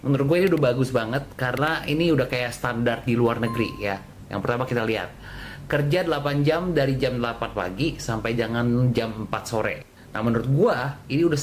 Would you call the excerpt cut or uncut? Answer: uncut